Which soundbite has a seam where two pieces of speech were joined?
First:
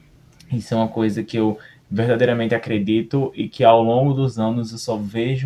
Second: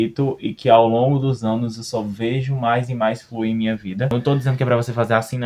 second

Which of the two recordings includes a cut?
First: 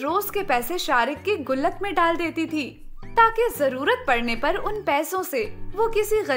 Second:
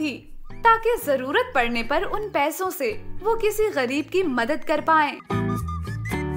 second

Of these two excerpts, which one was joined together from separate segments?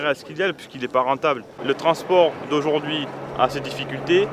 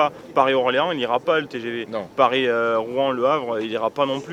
first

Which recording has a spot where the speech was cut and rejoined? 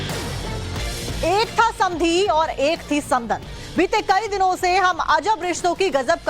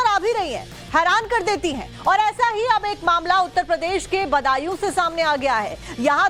first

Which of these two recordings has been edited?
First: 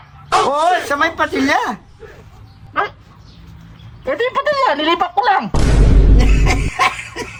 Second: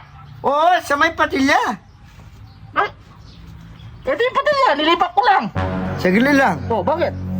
second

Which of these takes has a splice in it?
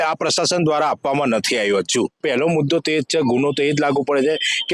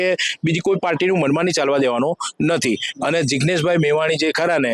first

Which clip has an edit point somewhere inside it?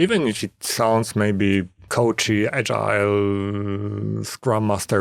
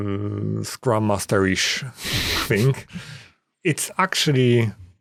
first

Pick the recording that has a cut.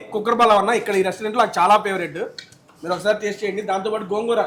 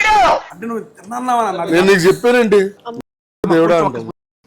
second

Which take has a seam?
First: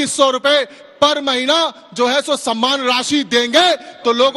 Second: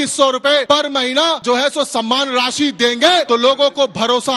second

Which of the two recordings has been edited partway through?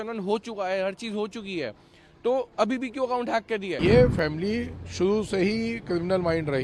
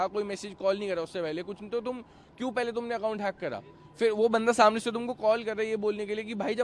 first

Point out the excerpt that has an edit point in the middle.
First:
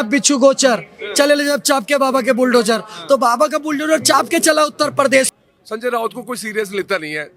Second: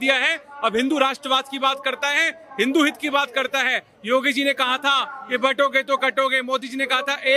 first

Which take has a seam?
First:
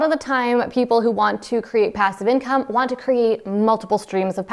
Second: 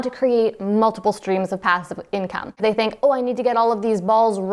second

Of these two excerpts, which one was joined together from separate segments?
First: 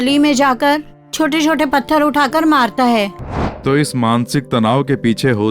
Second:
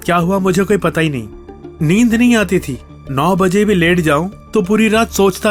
first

